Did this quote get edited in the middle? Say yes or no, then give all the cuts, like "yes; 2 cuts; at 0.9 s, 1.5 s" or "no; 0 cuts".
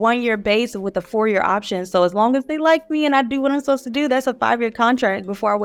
no; 0 cuts